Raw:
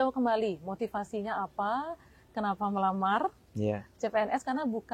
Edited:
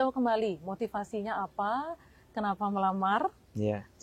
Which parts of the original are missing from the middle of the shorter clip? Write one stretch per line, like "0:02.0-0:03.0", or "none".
none